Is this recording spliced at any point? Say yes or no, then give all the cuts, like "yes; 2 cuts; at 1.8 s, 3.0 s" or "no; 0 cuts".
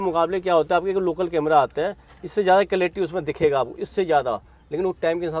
no; 0 cuts